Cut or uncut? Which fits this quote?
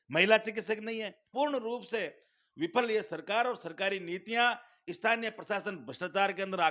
cut